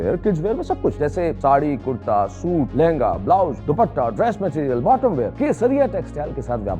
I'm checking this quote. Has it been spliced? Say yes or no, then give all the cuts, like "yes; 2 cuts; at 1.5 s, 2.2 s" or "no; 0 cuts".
yes; 4 cuts; at 1.1 s, 2.7 s, 3.6 s, 5.3 s